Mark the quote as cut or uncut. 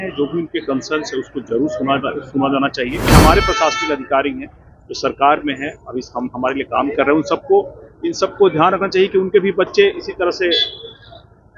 cut